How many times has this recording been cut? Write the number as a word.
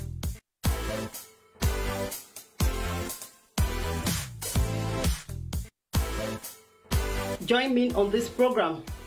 two